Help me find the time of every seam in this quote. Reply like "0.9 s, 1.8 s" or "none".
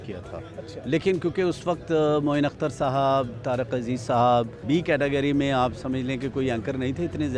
4.6 s